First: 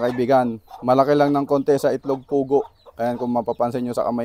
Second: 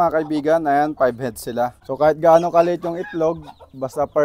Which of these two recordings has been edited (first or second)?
second